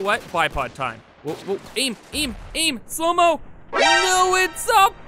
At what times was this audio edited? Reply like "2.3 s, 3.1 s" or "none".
1.1 s